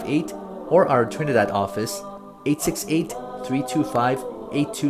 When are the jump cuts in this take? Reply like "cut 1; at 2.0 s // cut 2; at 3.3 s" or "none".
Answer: none